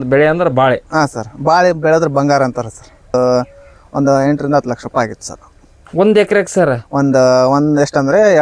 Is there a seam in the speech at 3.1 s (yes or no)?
yes